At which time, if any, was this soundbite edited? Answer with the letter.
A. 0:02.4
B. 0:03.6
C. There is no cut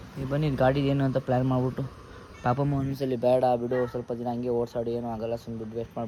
C